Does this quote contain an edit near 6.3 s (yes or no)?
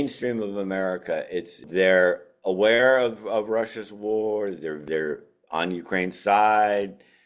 no